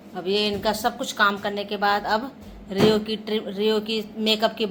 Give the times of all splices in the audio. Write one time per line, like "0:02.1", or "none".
none